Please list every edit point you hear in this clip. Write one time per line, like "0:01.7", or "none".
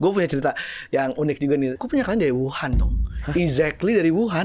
0:01.8